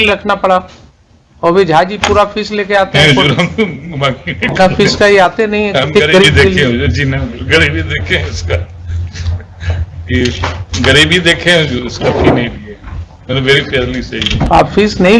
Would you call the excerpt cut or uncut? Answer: uncut